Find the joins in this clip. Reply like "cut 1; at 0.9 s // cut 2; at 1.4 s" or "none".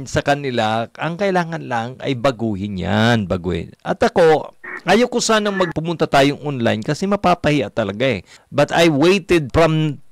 none